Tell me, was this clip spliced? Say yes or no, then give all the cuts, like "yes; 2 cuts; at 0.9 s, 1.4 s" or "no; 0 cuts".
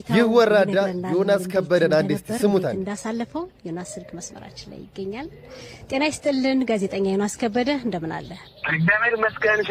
no; 0 cuts